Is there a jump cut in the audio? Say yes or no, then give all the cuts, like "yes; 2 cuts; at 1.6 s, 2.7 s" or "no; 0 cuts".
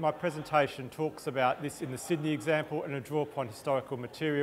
no; 0 cuts